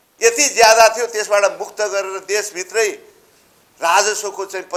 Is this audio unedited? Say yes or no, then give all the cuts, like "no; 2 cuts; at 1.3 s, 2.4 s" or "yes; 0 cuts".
yes; 0 cuts